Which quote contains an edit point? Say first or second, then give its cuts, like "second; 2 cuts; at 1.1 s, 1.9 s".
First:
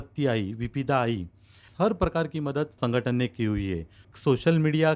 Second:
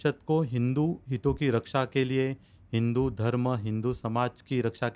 first; 3 cuts; at 1.7 s, 2.8 s, 4.1 s